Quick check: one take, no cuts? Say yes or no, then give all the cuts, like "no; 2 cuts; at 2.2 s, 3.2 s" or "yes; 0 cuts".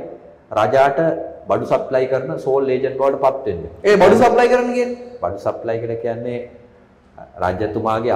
yes; 0 cuts